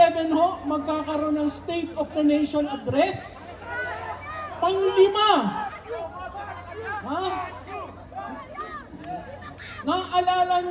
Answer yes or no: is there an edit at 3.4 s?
no